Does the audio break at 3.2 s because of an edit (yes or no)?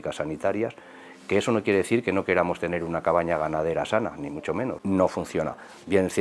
no